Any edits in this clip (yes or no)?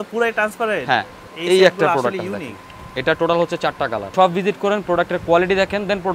yes